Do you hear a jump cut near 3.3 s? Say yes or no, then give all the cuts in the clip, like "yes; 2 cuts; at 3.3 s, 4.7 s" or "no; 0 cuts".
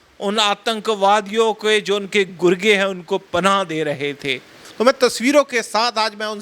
no; 1 cut; at 4.6 s